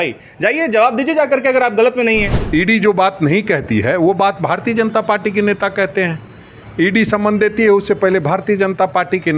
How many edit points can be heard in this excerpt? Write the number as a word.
one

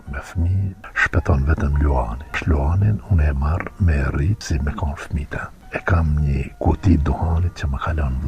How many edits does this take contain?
five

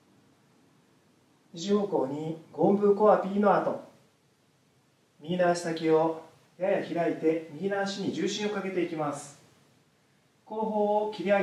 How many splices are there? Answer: one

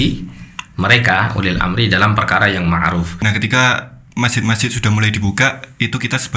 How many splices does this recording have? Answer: one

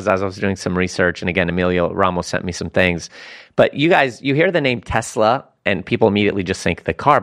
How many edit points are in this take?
zero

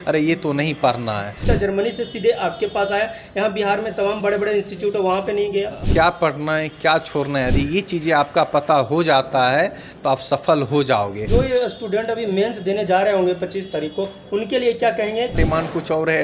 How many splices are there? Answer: four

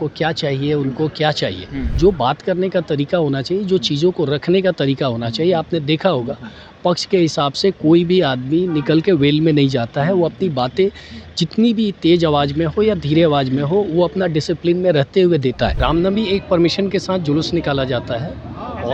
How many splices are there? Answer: two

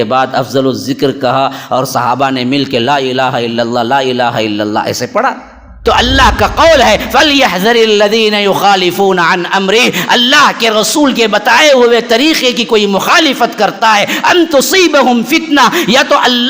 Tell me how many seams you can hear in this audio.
one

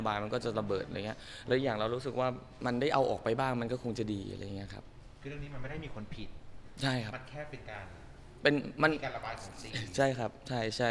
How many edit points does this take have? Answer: one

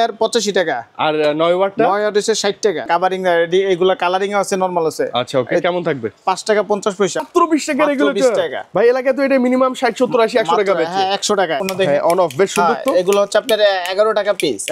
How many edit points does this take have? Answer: three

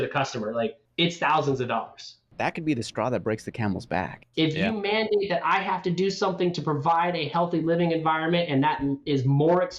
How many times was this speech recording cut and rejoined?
three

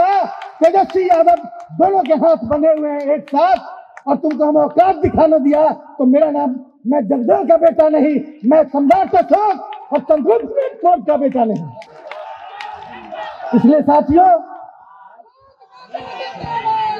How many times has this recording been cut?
zero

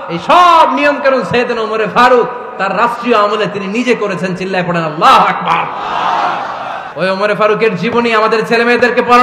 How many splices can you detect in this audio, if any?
one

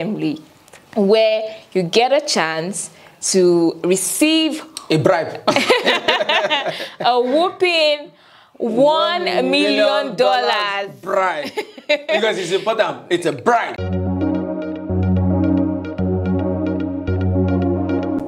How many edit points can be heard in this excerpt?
one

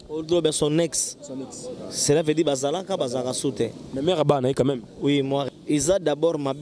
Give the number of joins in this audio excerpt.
one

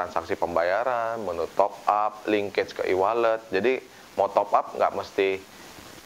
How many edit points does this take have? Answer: zero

